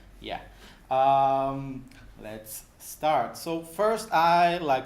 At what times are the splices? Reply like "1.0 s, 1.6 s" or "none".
none